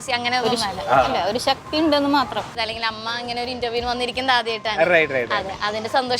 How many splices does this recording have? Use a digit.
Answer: 1